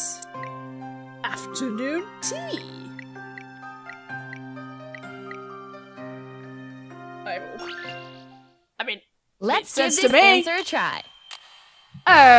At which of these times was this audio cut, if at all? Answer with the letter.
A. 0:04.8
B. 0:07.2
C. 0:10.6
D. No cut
C